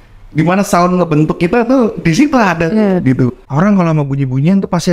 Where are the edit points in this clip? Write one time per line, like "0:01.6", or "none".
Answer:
0:03.4